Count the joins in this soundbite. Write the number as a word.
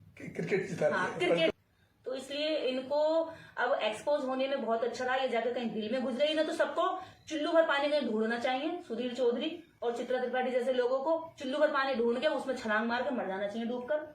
one